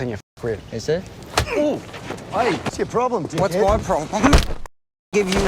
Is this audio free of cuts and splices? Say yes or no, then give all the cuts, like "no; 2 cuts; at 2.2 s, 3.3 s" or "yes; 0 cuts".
no; 1 cut; at 2.7 s